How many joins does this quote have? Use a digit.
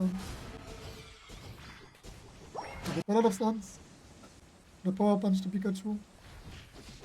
1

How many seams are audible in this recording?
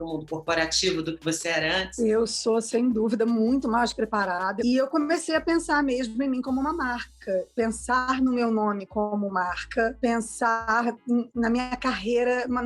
2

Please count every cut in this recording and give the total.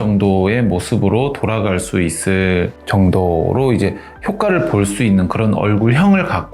1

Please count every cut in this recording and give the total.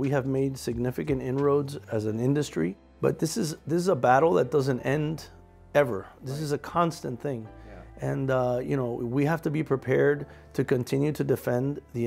2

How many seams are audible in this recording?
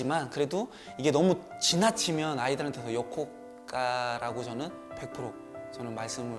0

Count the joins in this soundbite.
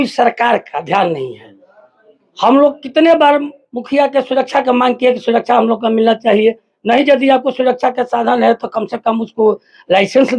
0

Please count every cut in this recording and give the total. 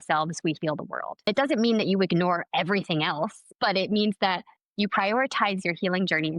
1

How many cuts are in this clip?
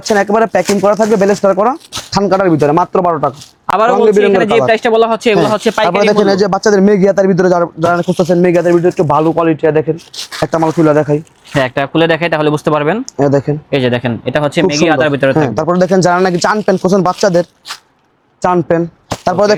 0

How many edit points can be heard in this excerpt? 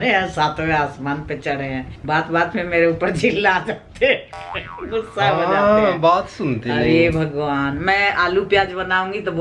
0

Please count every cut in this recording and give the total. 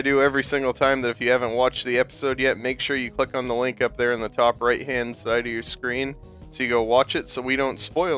1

